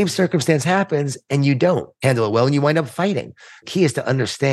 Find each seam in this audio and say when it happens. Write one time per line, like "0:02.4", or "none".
0:01.9
0:03.6